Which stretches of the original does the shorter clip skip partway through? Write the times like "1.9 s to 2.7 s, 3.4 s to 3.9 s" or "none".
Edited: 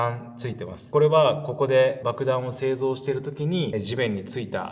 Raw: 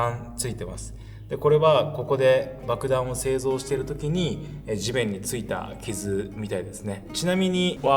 0.9 s to 1.4 s, 2.5 s to 2.6 s, 4.3 s to 4.7 s